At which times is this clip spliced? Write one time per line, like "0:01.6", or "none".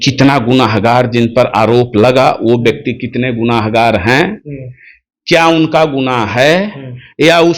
none